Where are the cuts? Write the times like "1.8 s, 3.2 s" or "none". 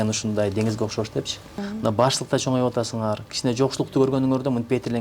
1.7 s